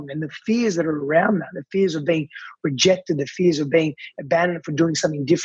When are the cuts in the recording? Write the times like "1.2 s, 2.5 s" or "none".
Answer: none

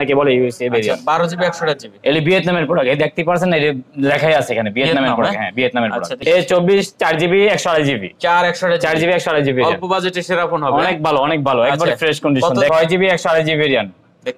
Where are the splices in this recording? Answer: 6.2 s, 12.7 s

